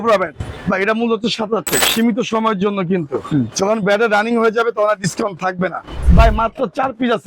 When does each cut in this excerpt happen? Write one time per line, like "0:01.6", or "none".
0:01.8
0:06.0